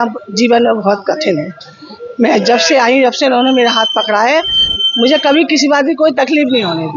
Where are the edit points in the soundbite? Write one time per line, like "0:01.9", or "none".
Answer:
none